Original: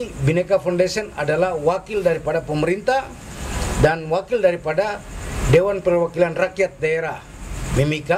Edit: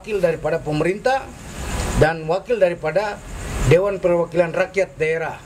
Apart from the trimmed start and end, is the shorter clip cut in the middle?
no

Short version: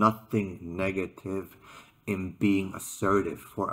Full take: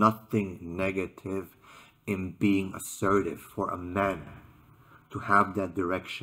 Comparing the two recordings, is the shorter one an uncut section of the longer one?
yes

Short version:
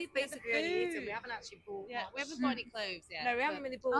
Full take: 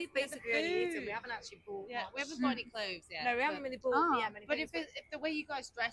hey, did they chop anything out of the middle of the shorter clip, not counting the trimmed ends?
no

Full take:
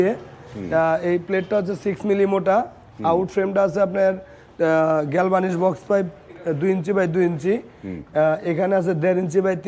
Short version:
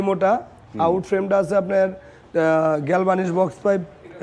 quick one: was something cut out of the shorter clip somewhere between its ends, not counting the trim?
no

